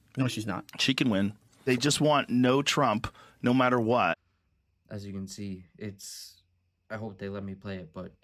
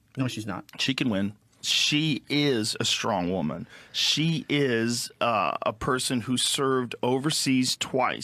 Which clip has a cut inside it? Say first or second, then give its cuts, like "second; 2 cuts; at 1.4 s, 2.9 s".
second; 1 cut; at 1.5 s